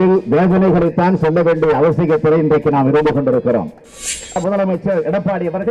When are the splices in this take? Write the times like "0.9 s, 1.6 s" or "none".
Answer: 4.4 s